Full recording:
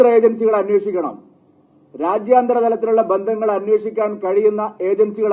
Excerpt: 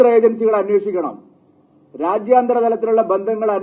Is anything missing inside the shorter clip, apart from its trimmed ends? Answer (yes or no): no